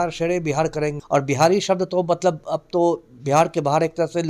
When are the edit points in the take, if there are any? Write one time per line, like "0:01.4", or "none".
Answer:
0:01.0